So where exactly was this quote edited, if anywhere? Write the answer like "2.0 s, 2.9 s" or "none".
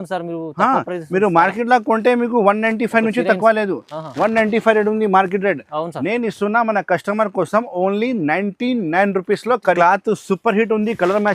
9.8 s